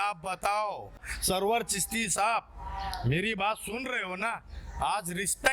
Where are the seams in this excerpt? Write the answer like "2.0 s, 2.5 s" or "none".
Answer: 1.1 s